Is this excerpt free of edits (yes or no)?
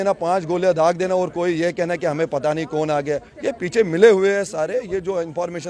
yes